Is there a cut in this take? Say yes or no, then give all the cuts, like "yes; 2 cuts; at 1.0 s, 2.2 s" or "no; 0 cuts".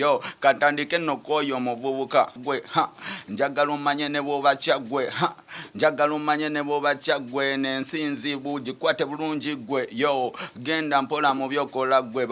yes; 1 cut; at 2.4 s